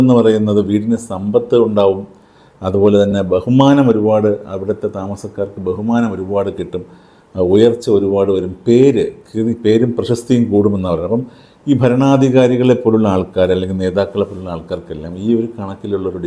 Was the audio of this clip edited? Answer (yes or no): no